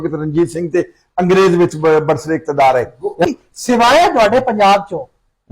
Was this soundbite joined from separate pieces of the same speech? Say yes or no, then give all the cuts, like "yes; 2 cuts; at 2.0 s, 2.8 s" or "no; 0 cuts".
yes; 1 cut; at 3.3 s